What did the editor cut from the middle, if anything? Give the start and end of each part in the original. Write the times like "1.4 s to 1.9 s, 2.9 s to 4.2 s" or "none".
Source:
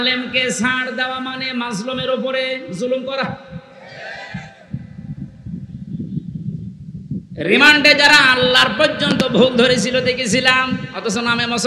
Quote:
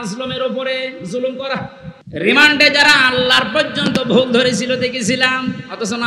3.7 s to 7.3 s